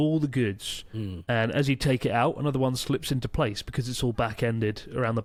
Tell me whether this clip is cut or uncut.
uncut